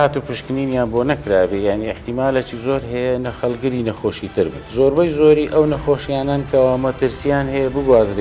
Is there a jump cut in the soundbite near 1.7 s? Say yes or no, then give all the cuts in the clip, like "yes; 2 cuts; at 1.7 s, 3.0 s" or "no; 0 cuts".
no; 1 cut; at 4.6 s